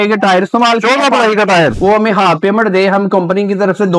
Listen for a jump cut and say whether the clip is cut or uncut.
cut